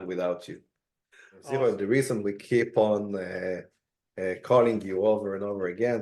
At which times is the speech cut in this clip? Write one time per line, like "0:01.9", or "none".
0:01.6